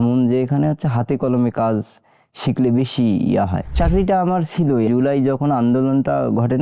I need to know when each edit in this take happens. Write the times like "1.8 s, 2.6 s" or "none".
3.6 s